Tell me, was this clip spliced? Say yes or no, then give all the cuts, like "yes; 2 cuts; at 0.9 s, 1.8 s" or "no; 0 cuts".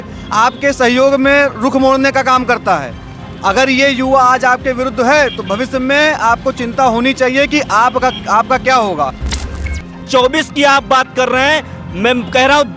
yes; 1 cut; at 9.6 s